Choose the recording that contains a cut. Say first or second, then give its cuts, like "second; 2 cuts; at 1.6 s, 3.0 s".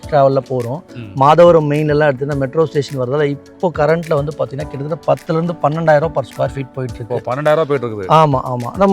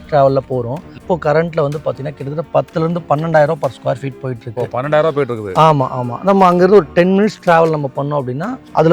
second; 1 cut; at 0.9 s